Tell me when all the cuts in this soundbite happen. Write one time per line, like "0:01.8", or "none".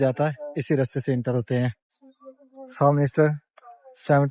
none

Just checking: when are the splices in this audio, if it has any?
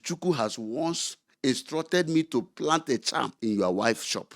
0:03.3

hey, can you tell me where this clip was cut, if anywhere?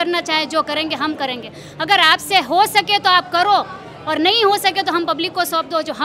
none

